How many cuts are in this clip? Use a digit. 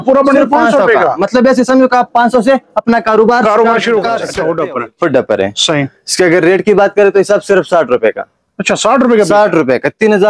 1